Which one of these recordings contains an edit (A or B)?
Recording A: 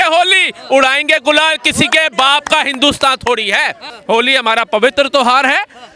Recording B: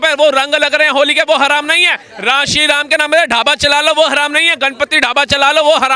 A